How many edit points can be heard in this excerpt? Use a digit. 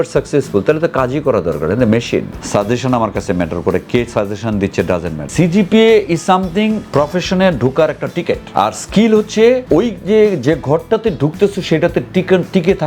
5